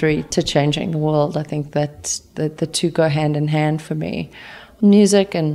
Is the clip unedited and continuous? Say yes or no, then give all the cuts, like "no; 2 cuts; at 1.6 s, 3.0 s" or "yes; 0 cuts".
no; 1 cut; at 4.6 s